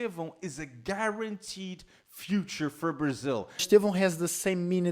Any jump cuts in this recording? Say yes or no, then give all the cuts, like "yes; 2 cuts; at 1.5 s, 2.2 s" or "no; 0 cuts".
yes; 1 cut; at 3.6 s